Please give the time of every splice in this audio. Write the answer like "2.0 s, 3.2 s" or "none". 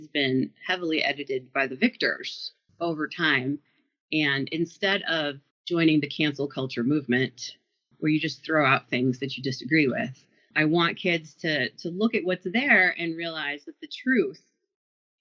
none